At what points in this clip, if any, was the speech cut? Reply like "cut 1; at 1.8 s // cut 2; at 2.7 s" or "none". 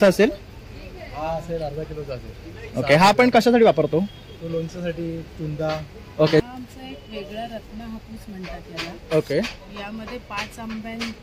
cut 1; at 6.4 s